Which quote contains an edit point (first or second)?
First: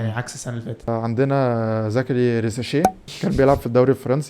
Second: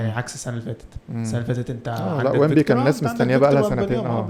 first